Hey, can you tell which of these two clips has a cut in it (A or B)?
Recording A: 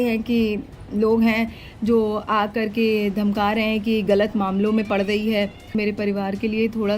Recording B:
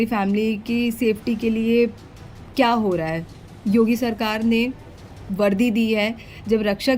A